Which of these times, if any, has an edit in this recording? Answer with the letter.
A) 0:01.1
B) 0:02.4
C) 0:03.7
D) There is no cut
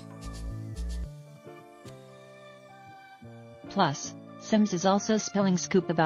C